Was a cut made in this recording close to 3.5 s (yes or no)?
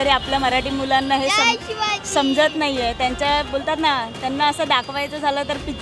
no